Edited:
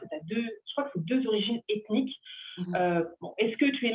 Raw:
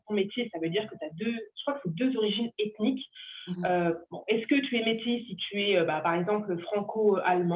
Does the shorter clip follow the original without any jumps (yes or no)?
yes